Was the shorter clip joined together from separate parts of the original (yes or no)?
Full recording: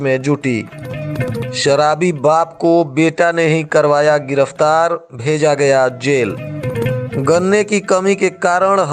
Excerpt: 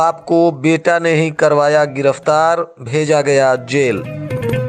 no